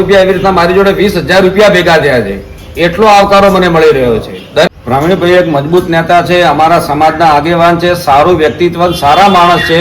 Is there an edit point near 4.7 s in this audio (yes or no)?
yes